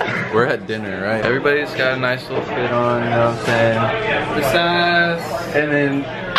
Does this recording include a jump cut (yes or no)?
yes